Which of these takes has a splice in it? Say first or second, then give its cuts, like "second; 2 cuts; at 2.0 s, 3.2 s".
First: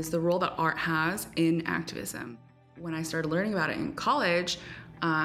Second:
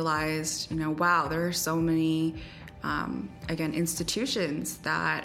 first; 1 cut; at 2.7 s